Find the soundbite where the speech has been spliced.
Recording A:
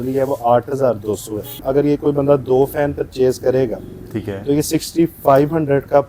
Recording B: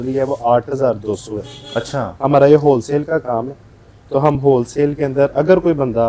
A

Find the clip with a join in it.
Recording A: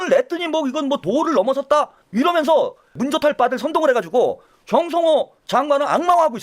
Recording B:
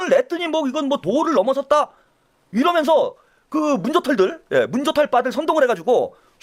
A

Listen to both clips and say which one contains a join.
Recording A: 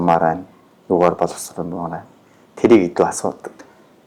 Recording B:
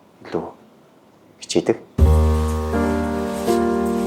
B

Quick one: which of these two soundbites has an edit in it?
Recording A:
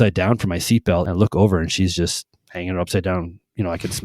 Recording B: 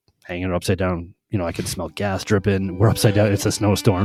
A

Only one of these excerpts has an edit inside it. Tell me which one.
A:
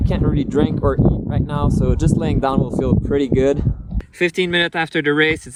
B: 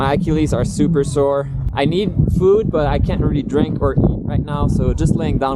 B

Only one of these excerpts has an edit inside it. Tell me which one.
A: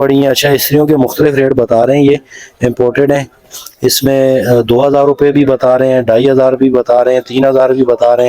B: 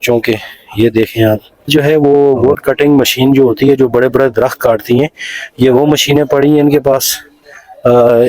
B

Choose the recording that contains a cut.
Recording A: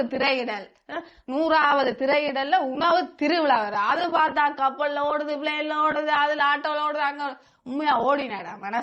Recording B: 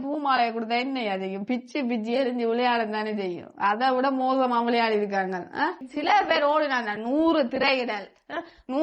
B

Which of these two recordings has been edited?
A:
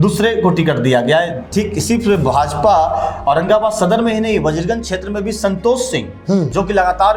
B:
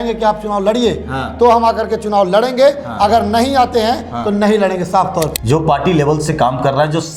B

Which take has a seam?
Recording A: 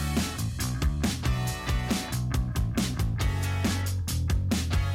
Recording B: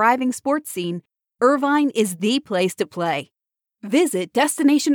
A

